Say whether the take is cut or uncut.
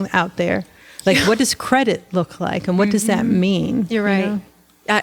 uncut